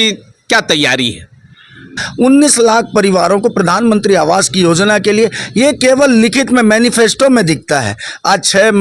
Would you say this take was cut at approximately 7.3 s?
no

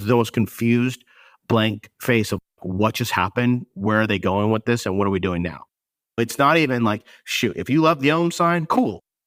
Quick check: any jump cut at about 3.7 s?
no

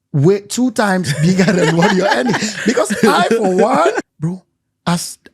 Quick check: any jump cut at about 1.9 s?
no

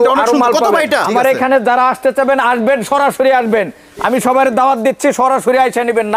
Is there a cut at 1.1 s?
yes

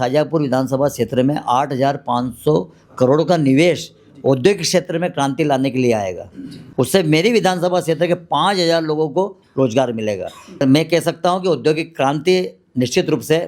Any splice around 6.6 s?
yes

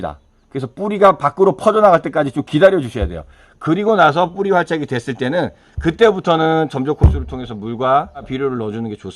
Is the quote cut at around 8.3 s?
yes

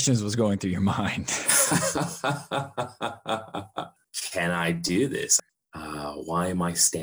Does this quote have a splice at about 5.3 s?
yes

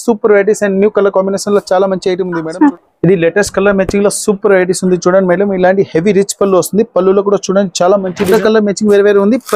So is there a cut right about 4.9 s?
no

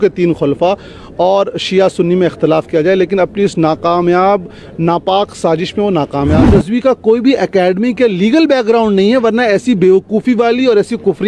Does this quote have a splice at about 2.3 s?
no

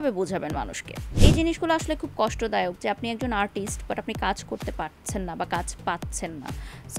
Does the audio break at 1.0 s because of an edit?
yes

